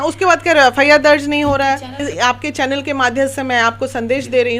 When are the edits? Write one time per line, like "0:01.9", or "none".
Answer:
0:02.0